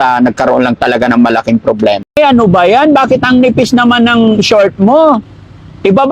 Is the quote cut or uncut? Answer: cut